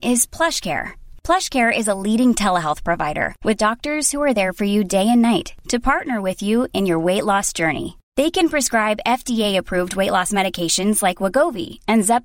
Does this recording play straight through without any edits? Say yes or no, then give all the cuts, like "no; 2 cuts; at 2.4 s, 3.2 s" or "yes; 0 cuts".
yes; 0 cuts